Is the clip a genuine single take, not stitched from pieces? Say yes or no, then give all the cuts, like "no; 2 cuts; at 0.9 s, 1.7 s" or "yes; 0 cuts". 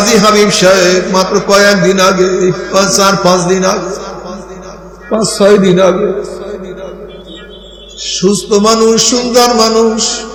yes; 0 cuts